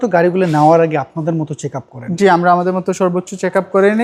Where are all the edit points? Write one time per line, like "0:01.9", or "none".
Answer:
none